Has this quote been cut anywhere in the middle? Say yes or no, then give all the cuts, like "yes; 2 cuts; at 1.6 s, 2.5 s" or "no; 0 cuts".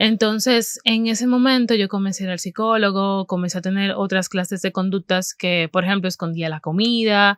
no; 0 cuts